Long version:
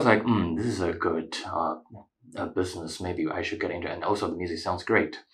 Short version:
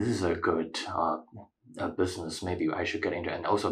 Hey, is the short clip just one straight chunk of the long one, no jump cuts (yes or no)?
yes